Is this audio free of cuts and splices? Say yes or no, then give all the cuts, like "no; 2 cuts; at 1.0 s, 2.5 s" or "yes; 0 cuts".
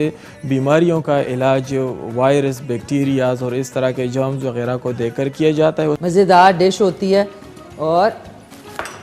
no; 1 cut; at 6.0 s